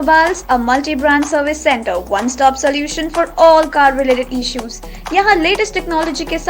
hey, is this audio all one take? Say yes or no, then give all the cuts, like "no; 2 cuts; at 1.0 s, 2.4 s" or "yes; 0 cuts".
yes; 0 cuts